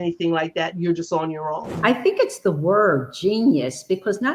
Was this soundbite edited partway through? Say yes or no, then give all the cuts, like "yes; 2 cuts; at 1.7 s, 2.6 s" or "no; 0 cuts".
yes; 1 cut; at 1.7 s